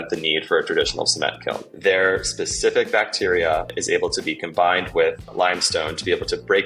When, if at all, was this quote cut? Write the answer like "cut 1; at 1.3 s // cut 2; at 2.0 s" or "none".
cut 1; at 1.7 s // cut 2; at 3.7 s // cut 3; at 5.3 s